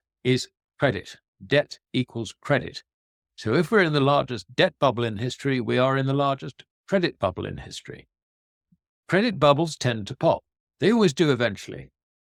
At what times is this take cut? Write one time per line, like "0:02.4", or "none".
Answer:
none